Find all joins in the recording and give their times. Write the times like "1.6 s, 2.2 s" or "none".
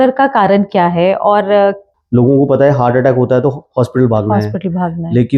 1.9 s